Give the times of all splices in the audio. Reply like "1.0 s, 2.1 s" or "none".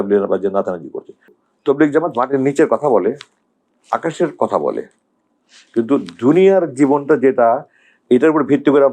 1.4 s